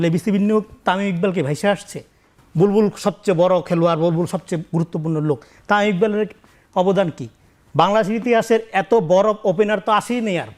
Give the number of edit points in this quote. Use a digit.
0